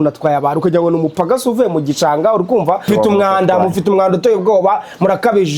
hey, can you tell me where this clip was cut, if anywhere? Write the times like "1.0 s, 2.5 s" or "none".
2.9 s